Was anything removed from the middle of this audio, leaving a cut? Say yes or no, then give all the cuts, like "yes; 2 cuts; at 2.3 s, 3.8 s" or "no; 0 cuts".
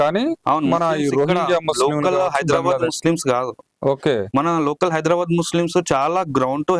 no; 0 cuts